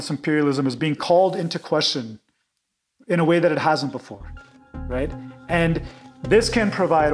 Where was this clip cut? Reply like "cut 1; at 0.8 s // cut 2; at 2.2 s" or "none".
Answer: none